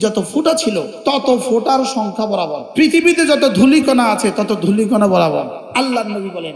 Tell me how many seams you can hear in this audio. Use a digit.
3